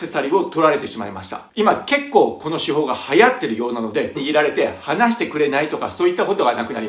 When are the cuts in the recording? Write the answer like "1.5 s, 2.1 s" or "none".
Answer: 1.5 s, 4.2 s